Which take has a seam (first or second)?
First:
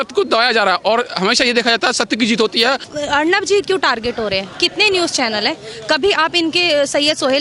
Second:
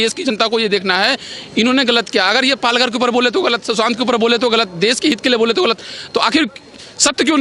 first